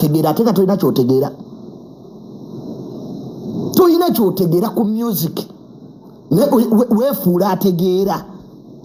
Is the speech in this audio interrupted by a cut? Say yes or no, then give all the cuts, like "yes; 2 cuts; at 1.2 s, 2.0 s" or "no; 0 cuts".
no; 0 cuts